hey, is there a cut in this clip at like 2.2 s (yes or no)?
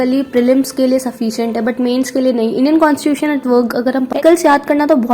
no